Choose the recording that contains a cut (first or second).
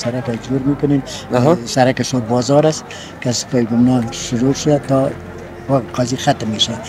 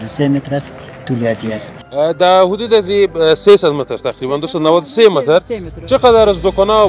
second